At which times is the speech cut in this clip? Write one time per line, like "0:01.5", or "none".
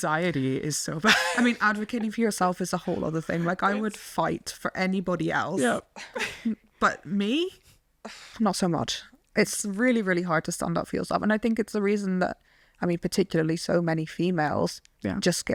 none